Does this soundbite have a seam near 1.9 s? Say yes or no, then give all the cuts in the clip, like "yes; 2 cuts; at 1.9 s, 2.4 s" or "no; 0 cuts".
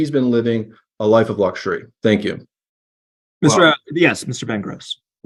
no; 0 cuts